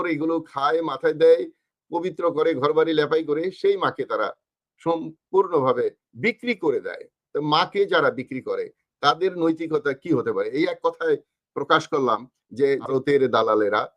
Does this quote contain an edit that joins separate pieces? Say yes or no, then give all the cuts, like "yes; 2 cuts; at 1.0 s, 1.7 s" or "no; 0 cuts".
yes; 1 cut; at 12.9 s